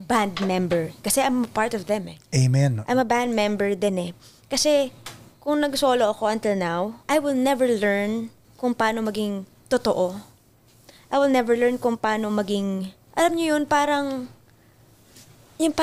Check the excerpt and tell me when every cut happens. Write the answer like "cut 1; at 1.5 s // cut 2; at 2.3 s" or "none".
cut 1; at 7.0 s // cut 2; at 8.4 s // cut 3; at 9.5 s // cut 4; at 13.0 s